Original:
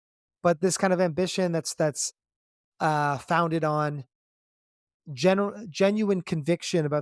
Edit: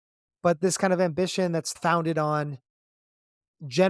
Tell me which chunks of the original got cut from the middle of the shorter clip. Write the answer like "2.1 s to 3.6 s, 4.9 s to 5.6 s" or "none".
1.7 s to 3.2 s